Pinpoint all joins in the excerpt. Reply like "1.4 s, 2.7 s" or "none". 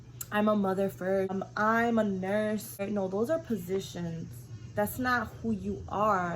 1.3 s, 2.8 s